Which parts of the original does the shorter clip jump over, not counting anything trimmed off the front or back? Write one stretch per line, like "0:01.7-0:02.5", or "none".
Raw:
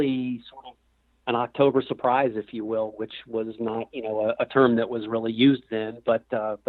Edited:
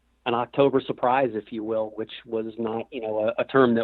none

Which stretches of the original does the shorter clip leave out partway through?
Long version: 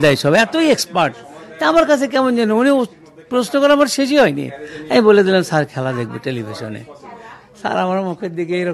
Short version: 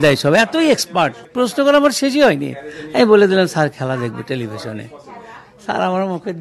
0:01.2-0:03.2

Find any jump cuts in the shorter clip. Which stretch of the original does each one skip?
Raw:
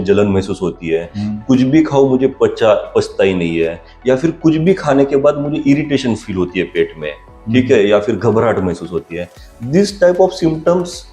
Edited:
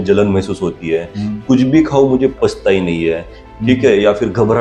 0:02.3-0:02.9
0:03.9-0:07.2

